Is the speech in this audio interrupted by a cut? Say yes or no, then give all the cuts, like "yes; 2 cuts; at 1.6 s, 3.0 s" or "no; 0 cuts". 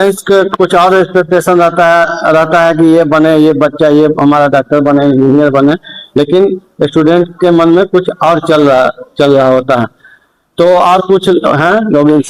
no; 0 cuts